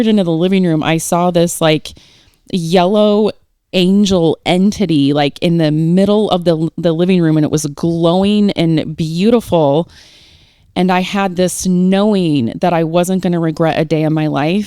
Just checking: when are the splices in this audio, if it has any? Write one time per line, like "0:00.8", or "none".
none